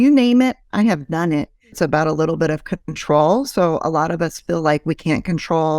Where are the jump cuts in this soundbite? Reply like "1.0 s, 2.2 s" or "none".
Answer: 1.8 s